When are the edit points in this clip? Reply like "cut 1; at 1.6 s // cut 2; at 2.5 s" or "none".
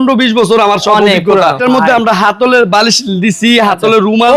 cut 1; at 1.6 s